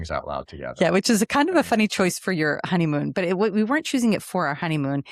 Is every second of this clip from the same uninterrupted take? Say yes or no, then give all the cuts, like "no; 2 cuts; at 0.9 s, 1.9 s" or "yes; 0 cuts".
yes; 0 cuts